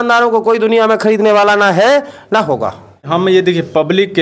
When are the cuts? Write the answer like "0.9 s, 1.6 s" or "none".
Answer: 3.0 s